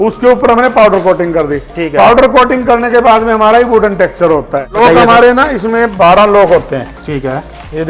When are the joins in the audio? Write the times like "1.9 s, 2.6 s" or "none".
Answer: 4.7 s